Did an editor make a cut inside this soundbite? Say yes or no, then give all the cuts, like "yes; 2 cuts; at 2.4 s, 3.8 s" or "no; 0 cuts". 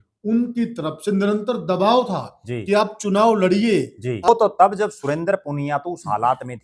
yes; 1 cut; at 4.3 s